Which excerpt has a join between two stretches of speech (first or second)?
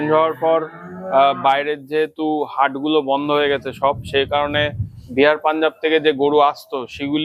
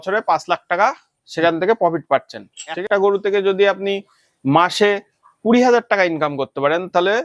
second